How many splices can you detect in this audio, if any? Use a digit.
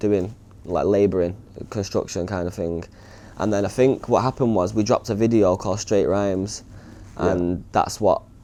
0